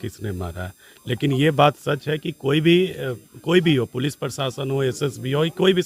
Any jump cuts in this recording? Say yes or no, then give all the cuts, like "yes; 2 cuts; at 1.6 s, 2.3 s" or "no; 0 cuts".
no; 0 cuts